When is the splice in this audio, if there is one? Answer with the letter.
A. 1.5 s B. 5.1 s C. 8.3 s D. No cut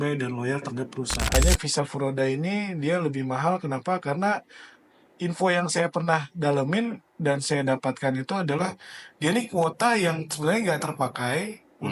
A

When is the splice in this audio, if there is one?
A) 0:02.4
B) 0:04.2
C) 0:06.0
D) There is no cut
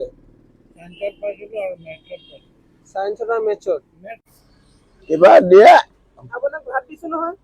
B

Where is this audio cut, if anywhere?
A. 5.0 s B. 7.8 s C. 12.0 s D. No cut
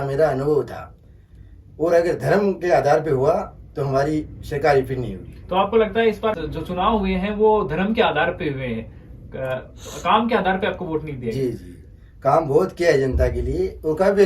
D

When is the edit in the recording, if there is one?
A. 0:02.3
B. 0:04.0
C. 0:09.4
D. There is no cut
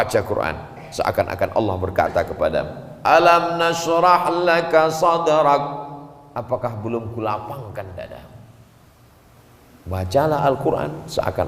C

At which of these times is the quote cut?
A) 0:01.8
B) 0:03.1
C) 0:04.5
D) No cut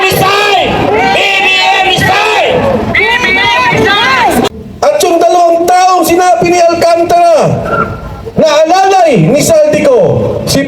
C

